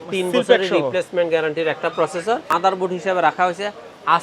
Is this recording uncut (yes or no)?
no